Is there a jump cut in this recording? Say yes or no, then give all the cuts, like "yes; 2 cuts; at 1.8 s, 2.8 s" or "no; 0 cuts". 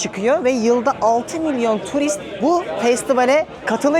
yes; 1 cut; at 2.3 s